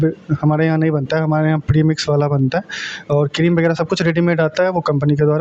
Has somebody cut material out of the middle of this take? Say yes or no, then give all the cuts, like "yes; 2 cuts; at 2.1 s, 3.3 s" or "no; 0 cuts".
no; 0 cuts